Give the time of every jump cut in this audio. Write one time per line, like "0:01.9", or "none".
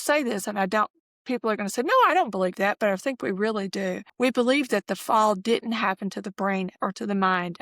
0:04.0
0:06.7